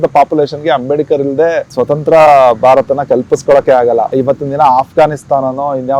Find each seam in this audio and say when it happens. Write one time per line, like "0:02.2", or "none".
0:01.7
0:04.1